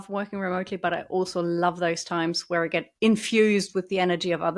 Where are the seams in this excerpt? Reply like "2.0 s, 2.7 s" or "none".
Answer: 2.9 s